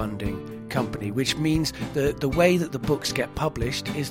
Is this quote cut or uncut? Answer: uncut